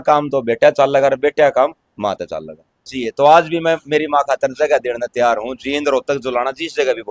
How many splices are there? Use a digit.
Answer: 1